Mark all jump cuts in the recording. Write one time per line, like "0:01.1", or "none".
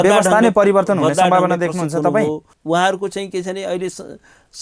0:02.5